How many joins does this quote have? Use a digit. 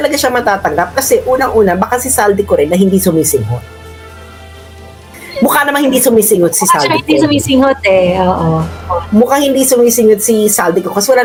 0